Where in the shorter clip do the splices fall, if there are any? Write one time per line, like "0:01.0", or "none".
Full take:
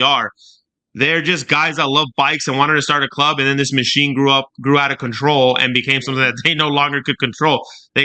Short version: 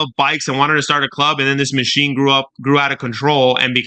none